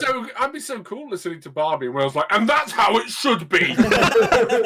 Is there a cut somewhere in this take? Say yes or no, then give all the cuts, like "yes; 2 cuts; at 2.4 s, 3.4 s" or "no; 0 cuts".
no; 0 cuts